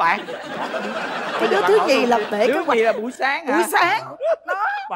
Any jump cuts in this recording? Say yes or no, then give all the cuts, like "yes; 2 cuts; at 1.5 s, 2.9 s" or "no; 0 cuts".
no; 0 cuts